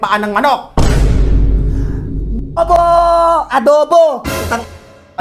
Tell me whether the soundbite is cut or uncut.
uncut